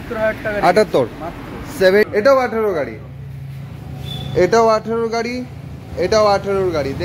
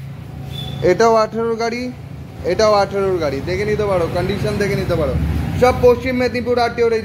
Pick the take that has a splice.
first; 1 cut; at 2.1 s

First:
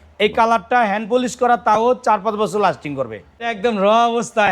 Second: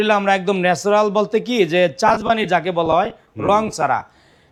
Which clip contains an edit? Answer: first; 1 cut; at 3.5 s

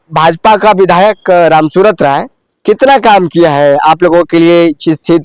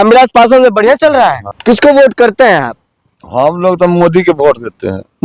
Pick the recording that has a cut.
second; 1 cut; at 1.5 s

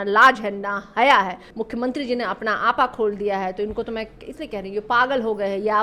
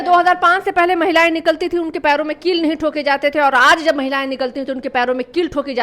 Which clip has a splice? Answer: first; 1 cut; at 1.5 s

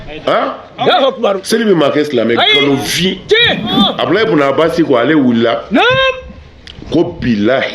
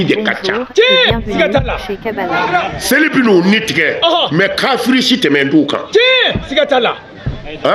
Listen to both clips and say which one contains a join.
first; 1 cut; at 3.8 s

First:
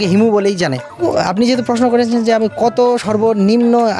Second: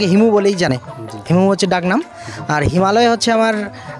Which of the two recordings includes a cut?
first; 1 cut; at 1.0 s

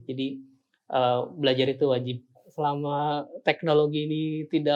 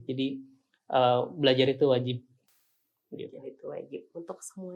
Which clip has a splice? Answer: first; 1 cut; at 2.5 s

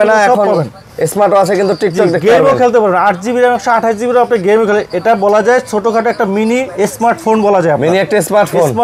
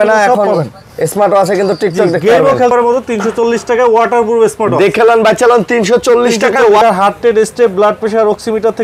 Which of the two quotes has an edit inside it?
second; 2 cuts; at 2.7 s, 6.8 s

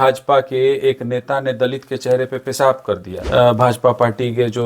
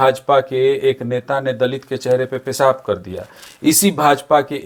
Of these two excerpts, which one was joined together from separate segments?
first; 1 cut; at 3.1 s

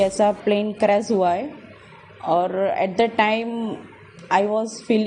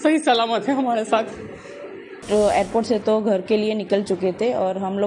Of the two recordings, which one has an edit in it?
second; 1 cut; at 2.2 s

